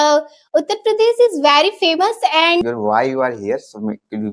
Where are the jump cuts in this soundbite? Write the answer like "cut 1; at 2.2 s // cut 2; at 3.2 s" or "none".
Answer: cut 1; at 2.6 s